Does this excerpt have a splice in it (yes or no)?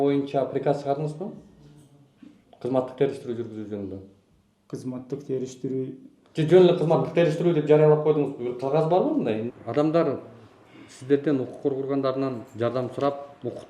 yes